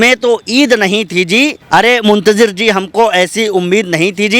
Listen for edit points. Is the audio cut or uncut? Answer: cut